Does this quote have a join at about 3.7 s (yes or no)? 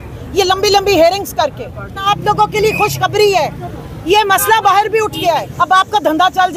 no